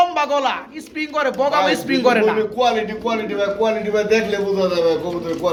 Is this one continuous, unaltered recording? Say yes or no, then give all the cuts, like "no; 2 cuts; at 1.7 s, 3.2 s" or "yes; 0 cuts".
yes; 0 cuts